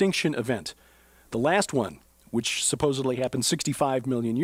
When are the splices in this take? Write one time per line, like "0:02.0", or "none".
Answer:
none